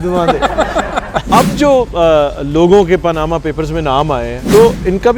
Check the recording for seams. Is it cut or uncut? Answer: cut